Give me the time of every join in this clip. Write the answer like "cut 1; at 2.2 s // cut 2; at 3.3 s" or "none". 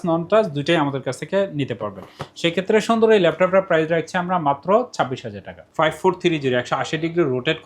cut 1; at 5.6 s

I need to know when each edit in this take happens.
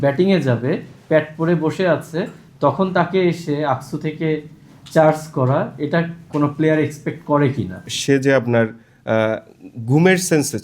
cut 1; at 6.2 s // cut 2; at 7.9 s

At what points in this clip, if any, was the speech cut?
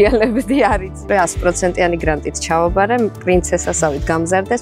cut 1; at 1.1 s

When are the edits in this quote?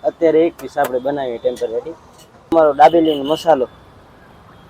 cut 1; at 2.5 s

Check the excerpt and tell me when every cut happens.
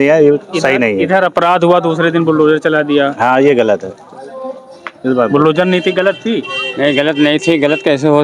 none

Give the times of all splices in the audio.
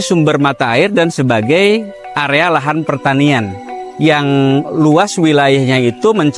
none

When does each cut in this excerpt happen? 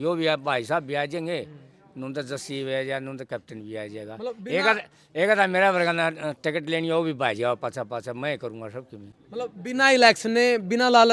none

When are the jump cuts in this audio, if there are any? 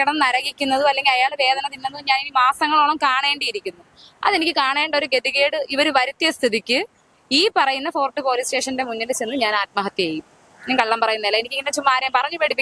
none

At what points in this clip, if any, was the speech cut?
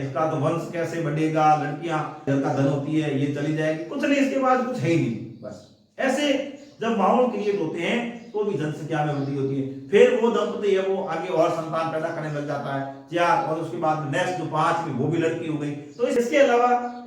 cut 1; at 2.3 s // cut 2; at 16.2 s

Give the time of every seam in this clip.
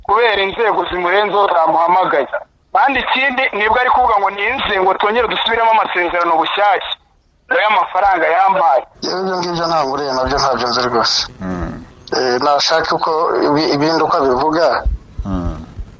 cut 1; at 9.0 s

